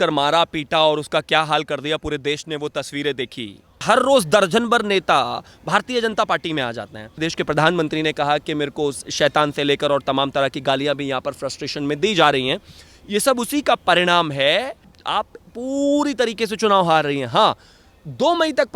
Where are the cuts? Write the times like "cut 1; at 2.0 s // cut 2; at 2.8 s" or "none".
cut 1; at 3.8 s // cut 2; at 7.2 s